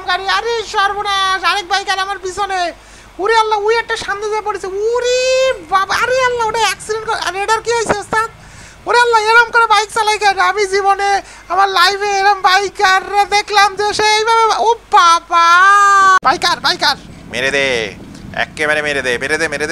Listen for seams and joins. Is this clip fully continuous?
no; 1 cut; at 16.2 s

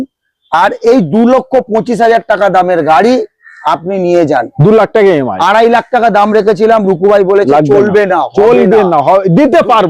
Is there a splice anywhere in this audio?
no; 0 cuts

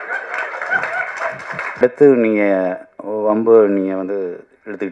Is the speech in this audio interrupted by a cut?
yes; 1 cut; at 1.8 s

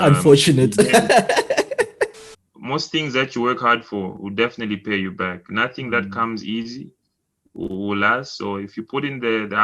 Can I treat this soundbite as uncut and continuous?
no; 1 cut; at 2.1 s

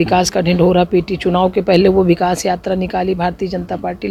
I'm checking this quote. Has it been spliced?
no; 0 cuts

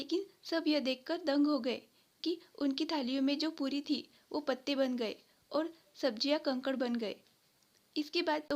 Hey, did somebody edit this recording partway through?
no; 0 cuts

